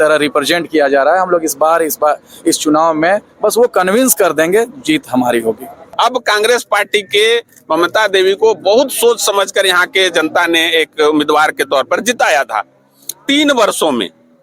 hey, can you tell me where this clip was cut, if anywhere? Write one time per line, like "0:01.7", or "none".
0:05.8